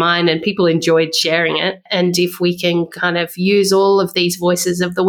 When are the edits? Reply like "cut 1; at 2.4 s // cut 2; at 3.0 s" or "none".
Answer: cut 1; at 1.9 s